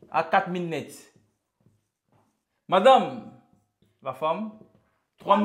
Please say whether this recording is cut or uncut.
uncut